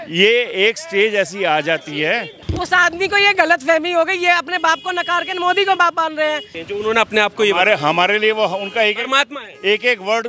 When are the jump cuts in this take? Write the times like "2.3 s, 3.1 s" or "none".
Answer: 2.4 s, 6.5 s